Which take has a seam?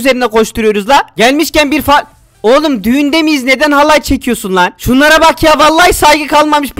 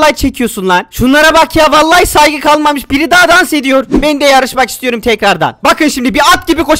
second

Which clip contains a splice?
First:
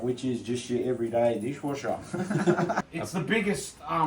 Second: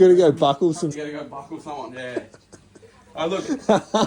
first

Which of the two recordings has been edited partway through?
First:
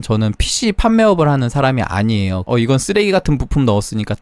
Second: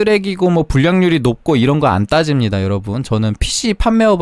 first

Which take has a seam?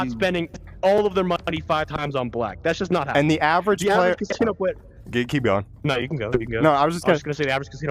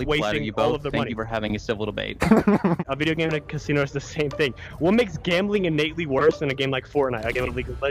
second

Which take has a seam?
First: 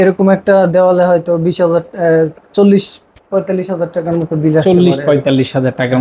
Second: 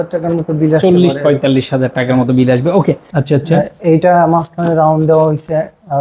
second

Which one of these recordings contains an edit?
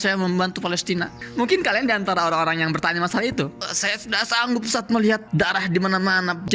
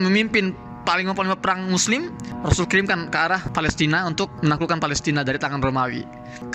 first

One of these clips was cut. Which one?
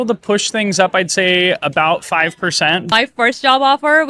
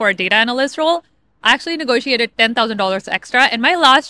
first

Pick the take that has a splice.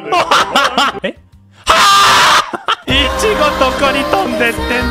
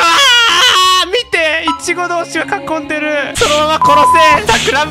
first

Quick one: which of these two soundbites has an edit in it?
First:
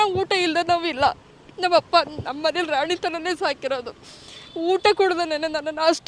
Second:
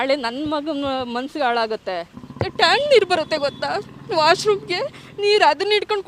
second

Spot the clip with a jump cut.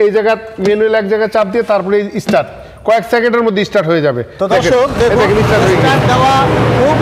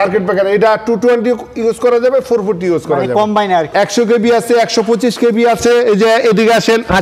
second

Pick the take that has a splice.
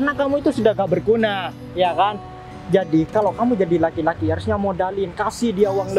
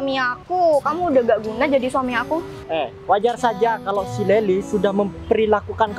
second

